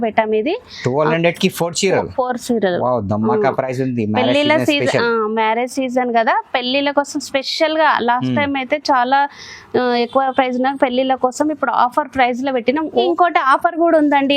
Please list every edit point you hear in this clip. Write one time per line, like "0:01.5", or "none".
0:13.1

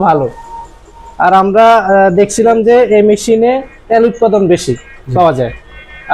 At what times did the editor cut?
none

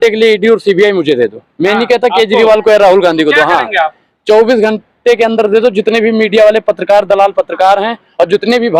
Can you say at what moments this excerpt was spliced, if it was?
none

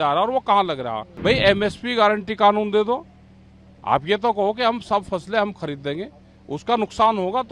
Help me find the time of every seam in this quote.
0:01.1

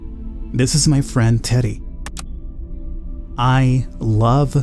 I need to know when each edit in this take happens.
0:01.7

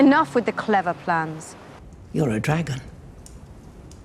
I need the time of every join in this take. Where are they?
0:01.9

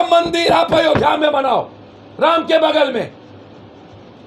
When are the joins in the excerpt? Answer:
none

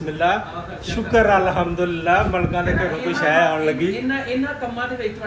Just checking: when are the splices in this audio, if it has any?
none

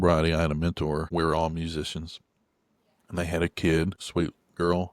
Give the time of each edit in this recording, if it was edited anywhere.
0:01.1
0:04.0

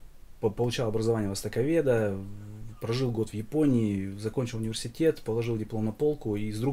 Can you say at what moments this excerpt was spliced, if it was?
none

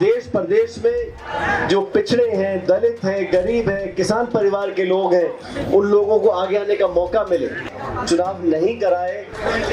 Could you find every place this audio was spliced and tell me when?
0:07.8

